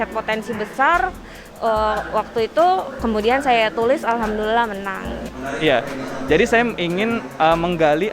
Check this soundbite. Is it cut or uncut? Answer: uncut